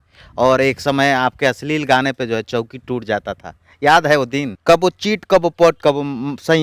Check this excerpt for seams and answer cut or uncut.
cut